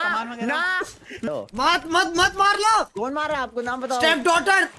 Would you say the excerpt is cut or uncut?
cut